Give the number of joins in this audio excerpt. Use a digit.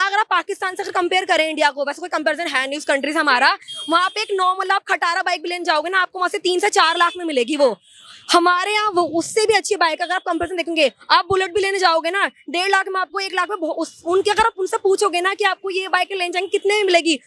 0